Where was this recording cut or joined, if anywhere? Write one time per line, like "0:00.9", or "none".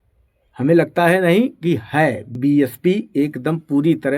0:02.3